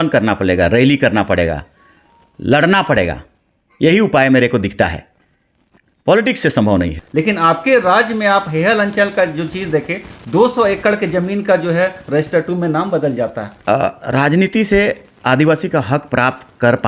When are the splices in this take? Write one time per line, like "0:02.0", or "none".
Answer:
0:07.0
0:13.5